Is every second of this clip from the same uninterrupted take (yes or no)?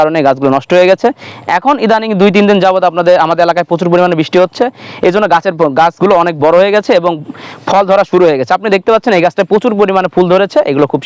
yes